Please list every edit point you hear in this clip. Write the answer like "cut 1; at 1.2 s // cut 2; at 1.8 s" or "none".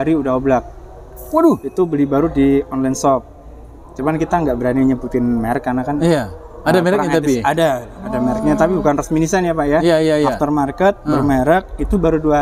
none